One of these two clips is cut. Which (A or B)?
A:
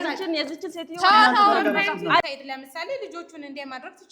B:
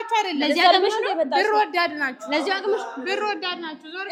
A